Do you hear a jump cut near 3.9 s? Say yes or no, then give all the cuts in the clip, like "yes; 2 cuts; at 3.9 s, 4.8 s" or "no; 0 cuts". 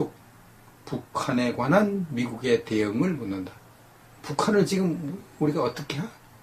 no; 1 cut; at 1.7 s